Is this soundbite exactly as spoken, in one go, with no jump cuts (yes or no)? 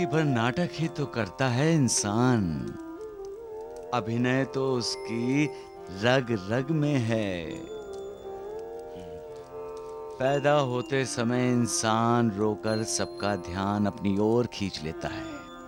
yes